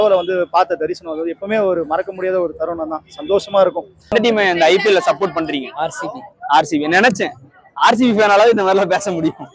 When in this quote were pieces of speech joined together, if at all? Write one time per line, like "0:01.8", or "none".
0:04.1